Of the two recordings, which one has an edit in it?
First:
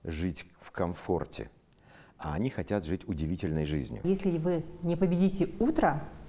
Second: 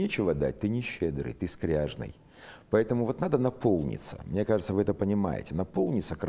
first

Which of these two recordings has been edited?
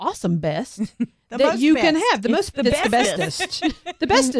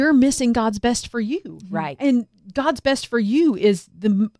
second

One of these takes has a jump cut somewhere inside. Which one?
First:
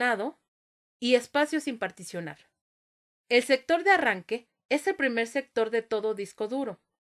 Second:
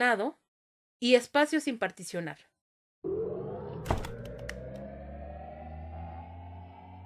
first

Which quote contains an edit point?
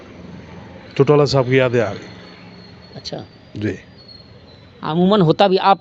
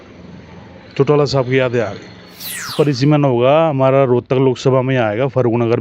second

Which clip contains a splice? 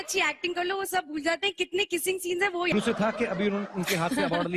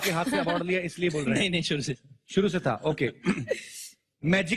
first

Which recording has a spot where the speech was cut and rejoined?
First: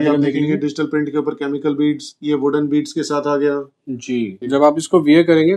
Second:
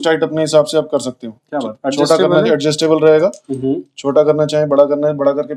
first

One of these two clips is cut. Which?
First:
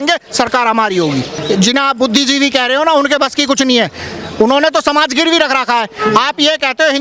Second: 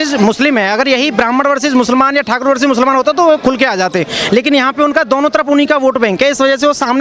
first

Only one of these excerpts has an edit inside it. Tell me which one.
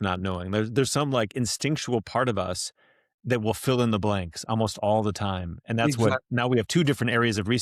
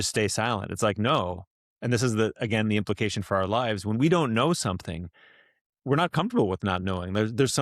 second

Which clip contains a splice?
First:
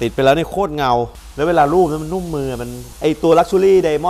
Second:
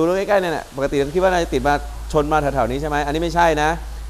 first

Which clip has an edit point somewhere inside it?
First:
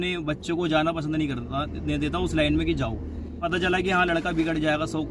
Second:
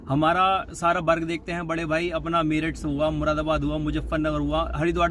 first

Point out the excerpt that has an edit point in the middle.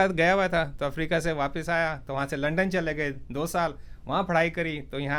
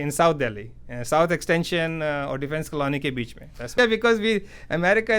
second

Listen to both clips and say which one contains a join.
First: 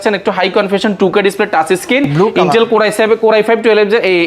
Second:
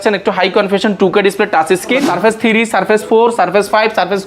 second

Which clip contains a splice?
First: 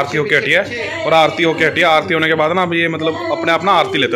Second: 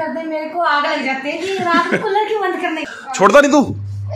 second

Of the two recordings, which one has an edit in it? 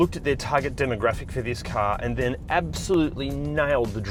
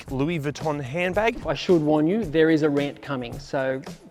second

